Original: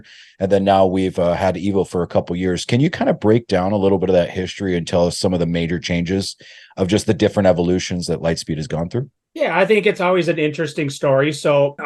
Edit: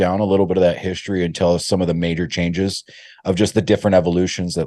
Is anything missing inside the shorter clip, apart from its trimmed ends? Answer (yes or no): no